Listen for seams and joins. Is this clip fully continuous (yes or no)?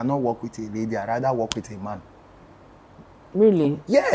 yes